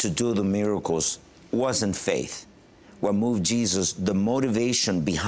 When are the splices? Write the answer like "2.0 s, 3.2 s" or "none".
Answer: none